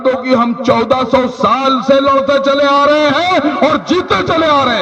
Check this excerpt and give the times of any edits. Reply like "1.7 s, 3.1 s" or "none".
none